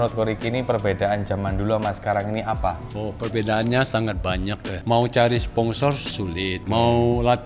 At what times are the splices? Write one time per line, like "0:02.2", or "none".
0:02.9
0:04.7
0:06.6